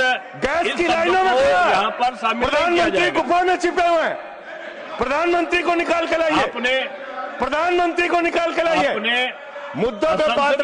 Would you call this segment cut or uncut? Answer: uncut